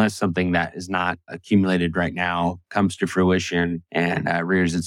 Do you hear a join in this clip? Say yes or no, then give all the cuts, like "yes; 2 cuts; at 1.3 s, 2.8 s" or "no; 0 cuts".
yes; 2 cuts; at 1.3 s, 3.8 s